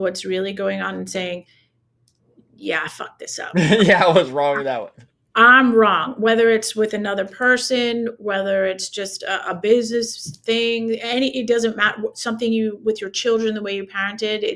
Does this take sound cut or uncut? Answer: uncut